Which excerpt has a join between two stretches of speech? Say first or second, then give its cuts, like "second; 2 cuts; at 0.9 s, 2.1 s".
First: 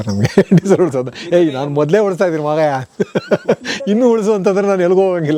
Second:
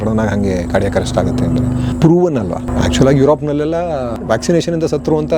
second; 3 cuts; at 1.9 s, 2.7 s, 4.2 s